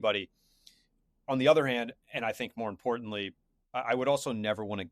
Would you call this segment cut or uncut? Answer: cut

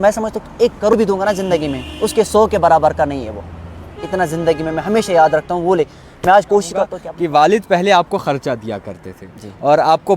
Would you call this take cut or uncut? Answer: cut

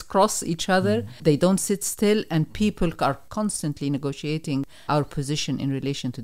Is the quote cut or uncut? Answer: cut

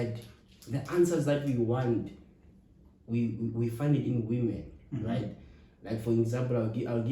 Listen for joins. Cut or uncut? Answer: uncut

